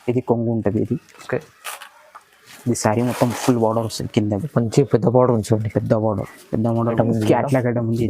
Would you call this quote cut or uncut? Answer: cut